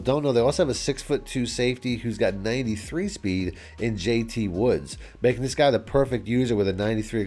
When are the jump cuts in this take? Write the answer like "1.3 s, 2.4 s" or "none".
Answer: none